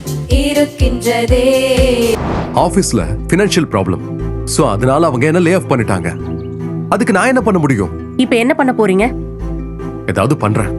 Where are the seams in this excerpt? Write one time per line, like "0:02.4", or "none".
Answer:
0:02.2

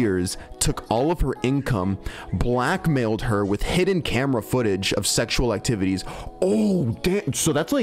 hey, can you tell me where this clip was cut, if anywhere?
none

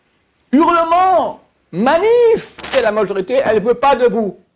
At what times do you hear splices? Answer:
0:02.7

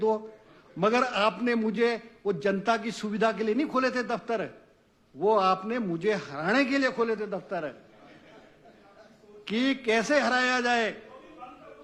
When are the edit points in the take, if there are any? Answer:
none

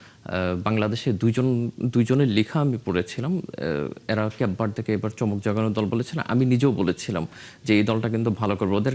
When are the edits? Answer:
none

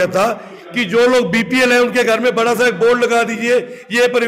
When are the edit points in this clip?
none

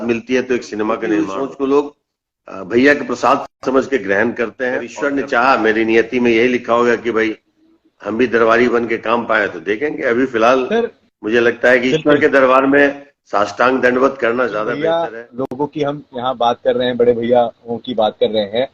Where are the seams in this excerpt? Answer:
0:01.1
0:04.9
0:14.7

